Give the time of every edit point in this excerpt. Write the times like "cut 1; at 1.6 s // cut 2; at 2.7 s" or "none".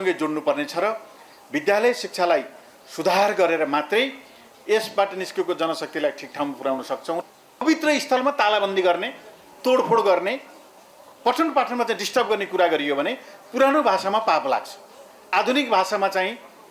cut 1; at 7.4 s